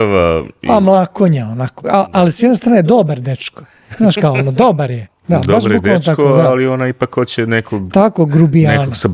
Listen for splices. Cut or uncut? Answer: cut